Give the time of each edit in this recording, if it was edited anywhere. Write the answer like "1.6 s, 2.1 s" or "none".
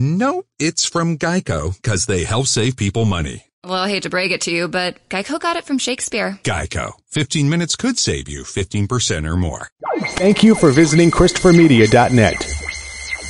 9.7 s